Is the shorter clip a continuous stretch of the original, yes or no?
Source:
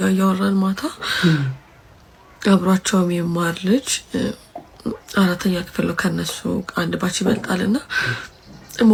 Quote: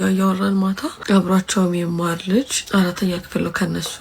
no